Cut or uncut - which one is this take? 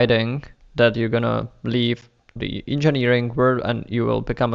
cut